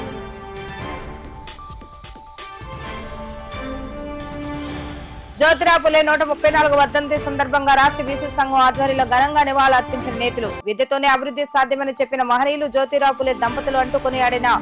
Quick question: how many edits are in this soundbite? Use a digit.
1